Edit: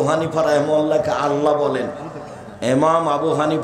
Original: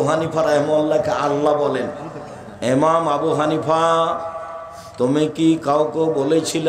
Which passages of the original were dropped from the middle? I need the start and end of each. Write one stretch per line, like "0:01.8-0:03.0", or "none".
none